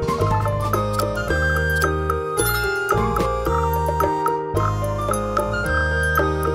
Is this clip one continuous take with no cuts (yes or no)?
yes